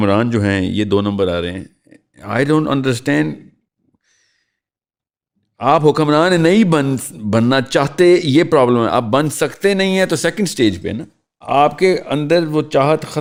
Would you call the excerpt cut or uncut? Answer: uncut